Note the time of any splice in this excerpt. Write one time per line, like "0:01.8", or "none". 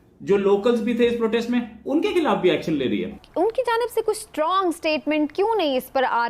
0:03.2